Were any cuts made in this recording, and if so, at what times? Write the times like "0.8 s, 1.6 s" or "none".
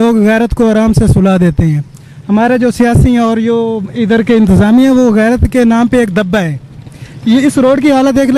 none